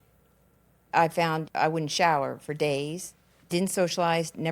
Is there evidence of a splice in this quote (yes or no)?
yes